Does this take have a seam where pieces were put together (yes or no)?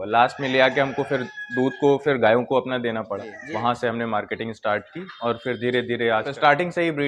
yes